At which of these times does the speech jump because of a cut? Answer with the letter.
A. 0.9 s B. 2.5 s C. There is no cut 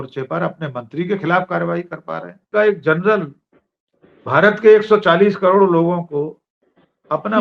B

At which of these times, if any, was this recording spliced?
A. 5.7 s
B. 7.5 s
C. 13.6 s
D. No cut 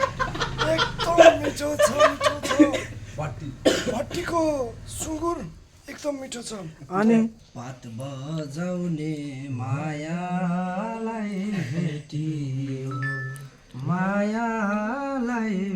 B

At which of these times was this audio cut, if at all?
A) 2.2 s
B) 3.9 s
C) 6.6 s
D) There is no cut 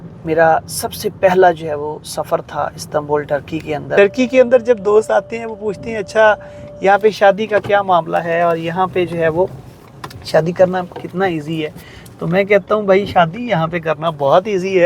B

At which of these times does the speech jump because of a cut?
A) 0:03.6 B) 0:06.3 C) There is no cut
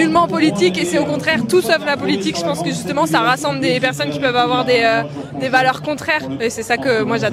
B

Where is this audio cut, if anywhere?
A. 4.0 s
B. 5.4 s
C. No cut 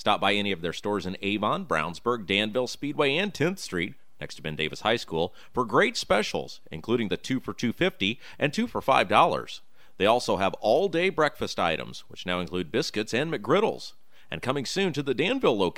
C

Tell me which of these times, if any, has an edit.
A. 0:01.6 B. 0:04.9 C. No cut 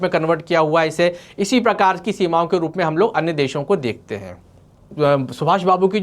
B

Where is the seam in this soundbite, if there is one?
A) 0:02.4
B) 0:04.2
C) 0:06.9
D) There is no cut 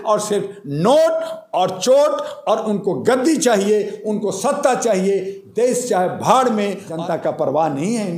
C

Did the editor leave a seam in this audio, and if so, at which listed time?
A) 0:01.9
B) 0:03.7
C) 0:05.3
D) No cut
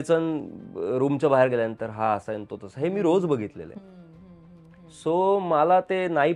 D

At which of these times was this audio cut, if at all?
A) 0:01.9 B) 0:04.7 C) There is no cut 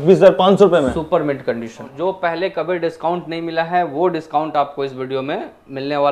A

